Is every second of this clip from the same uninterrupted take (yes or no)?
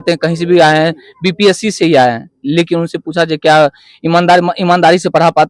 yes